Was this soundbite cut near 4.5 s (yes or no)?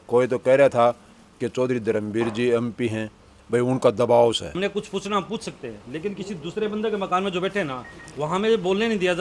yes